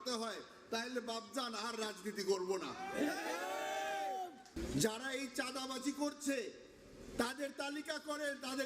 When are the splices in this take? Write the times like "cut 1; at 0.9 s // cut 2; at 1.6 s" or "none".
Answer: cut 1; at 4.4 s